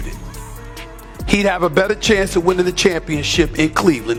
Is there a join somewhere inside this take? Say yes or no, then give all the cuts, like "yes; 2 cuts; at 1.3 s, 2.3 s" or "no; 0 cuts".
no; 0 cuts